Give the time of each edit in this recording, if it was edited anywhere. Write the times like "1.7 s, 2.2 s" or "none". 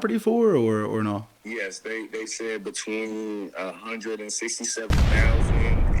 4.9 s